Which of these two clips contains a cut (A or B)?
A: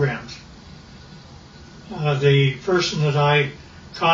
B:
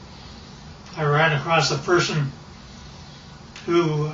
A